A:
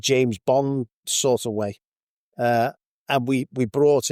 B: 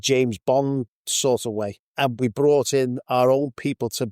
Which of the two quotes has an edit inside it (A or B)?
B